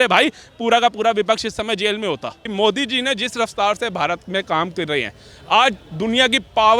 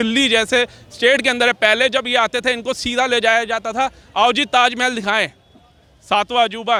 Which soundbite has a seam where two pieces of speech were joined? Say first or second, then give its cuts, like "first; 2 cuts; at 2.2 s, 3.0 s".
first; 1 cut; at 2.4 s